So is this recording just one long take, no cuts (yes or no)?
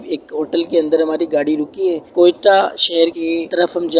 no